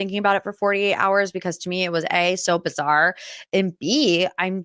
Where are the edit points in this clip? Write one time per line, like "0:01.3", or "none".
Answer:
none